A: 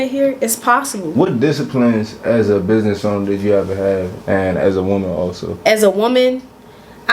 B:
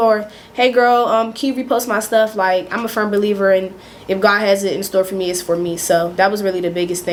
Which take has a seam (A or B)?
A